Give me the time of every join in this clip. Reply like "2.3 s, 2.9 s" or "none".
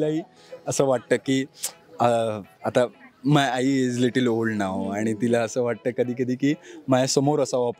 none